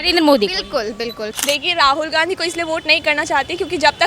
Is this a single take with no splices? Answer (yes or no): no